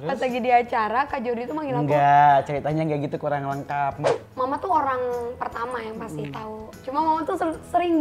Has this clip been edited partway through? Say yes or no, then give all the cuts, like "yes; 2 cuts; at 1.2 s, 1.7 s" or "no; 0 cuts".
yes; 1 cut; at 4.1 s